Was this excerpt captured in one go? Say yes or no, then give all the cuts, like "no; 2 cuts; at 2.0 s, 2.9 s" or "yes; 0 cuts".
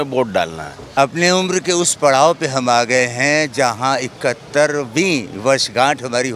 no; 1 cut; at 1.0 s